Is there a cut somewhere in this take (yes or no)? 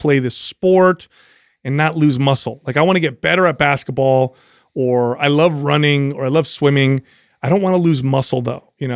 no